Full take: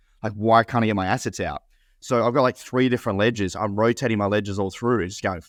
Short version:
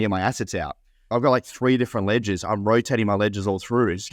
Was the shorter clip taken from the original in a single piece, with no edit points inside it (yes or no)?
no